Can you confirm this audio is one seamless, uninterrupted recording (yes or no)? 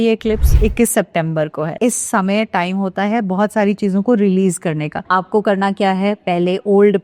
no